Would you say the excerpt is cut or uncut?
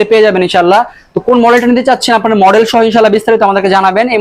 uncut